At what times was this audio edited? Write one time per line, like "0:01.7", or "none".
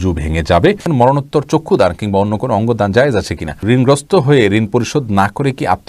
0:00.8
0:03.6